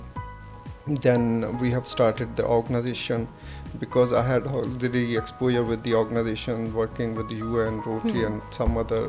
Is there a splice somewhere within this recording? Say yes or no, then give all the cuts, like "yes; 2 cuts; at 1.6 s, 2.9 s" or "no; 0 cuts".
no; 0 cuts